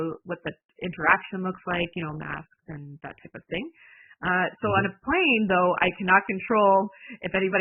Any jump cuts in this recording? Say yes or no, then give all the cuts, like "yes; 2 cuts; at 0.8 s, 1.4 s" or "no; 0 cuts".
no; 0 cuts